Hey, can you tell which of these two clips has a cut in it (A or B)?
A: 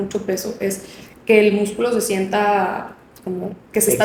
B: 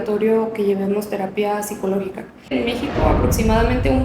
B